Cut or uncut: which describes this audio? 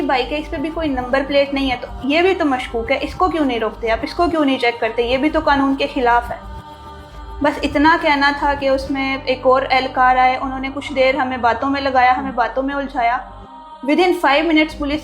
uncut